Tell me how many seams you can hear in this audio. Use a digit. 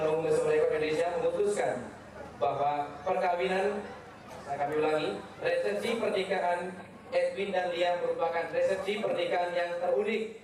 0